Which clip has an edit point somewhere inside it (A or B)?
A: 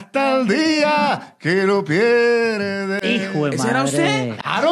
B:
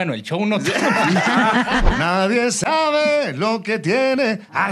B